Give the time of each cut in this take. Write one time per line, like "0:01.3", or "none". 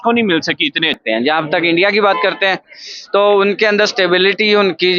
0:00.9